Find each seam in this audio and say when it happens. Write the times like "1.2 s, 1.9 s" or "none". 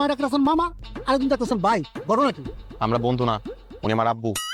none